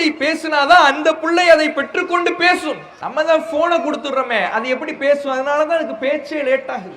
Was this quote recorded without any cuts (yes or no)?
no